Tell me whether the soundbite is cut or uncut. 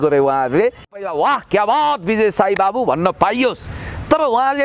cut